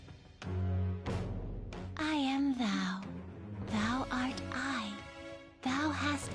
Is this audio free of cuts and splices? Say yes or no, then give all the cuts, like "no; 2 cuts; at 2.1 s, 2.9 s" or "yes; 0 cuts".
no; 2 cuts; at 0.9 s, 1.8 s